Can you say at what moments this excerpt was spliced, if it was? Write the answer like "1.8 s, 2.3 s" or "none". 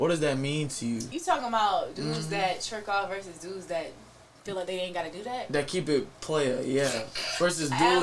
1.1 s